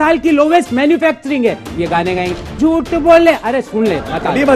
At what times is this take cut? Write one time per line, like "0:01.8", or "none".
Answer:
none